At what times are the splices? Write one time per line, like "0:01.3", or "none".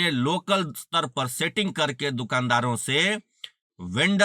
none